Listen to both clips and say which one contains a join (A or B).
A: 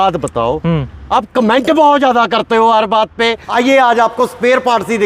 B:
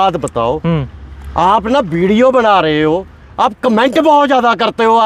A